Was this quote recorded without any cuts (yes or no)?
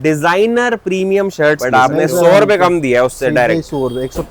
no